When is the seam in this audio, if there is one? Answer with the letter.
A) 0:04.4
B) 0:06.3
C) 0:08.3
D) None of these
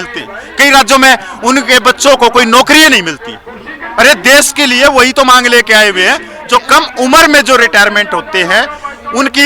B